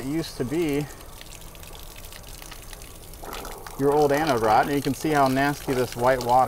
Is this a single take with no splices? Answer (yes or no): yes